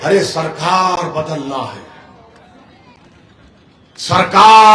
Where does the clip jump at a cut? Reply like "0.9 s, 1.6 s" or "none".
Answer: none